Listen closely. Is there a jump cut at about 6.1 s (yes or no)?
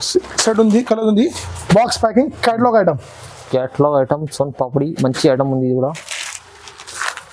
no